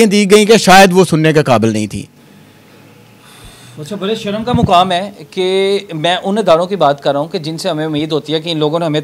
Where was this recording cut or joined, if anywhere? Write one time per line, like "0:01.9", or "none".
none